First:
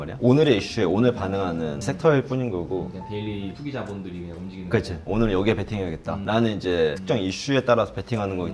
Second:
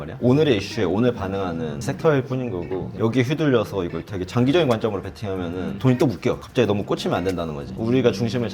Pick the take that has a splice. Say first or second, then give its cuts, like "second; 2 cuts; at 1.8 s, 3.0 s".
second; 3 cuts; at 2.9 s, 6.4 s, 7.7 s